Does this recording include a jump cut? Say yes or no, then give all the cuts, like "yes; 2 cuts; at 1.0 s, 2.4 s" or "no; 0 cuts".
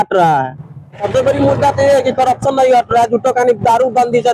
yes; 1 cut; at 1.1 s